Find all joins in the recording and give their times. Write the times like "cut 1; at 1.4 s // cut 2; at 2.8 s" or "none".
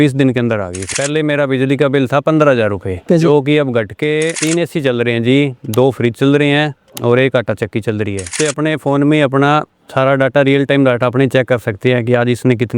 cut 1; at 0.9 s // cut 2; at 4.4 s // cut 3; at 8.3 s